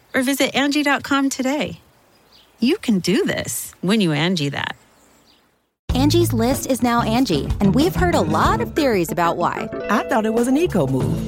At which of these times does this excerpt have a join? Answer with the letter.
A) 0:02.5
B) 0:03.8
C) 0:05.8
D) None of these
C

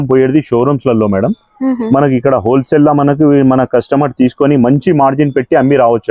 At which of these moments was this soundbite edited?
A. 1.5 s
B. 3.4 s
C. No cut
C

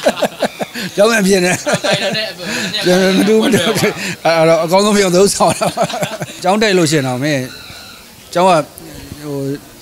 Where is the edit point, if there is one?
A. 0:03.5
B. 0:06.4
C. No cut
B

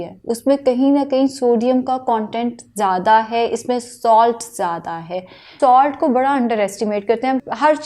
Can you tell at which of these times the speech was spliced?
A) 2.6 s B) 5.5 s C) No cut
B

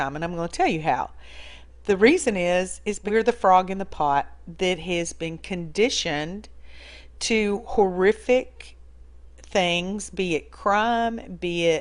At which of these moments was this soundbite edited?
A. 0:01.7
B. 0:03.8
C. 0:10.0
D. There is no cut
C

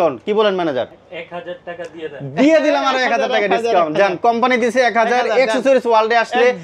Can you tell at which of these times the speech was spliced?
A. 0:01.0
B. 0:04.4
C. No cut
A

